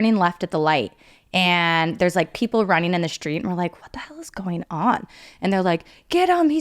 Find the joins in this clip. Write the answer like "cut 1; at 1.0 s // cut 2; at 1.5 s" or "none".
cut 1; at 5.2 s